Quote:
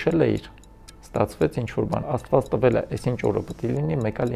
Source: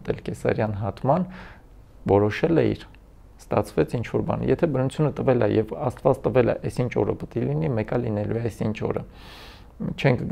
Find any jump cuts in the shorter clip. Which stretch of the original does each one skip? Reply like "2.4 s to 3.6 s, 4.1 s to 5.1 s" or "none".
4.4 s to 5.8 s